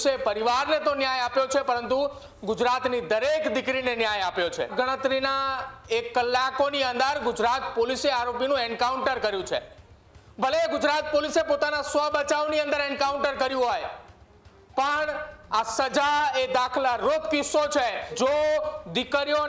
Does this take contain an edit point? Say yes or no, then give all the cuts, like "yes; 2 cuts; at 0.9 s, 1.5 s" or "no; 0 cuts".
yes; 2 cuts; at 4.7 s, 18.1 s